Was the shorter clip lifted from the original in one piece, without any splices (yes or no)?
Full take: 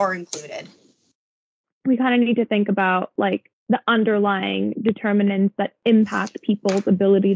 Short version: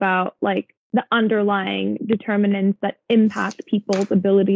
yes